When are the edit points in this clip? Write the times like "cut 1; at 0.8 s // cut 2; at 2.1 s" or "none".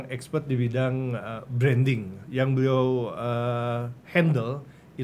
cut 1; at 2.2 s